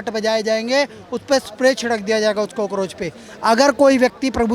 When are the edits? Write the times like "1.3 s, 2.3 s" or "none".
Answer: none